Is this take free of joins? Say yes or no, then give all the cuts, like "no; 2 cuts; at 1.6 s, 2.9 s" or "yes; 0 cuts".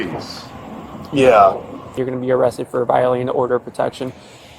no; 1 cut; at 2.0 s